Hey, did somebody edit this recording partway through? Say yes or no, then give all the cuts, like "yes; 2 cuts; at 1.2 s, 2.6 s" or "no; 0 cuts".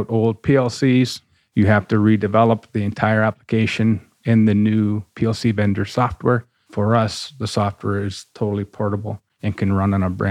yes; 2 cuts; at 5.1 s, 6.6 s